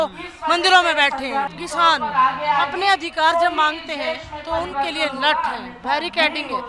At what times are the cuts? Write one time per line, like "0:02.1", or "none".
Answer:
0:01.5